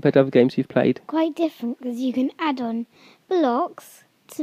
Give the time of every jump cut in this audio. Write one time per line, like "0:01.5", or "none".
0:01.1